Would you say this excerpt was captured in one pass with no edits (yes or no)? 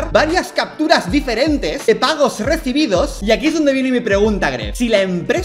no